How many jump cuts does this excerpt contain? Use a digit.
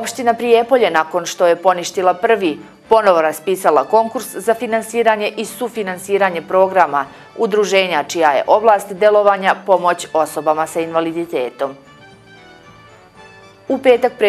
0